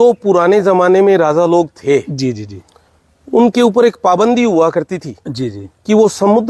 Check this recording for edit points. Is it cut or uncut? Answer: uncut